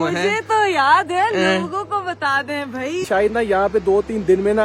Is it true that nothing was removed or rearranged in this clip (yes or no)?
no